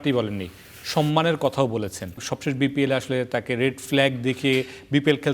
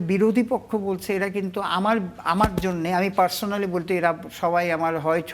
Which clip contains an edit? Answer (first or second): first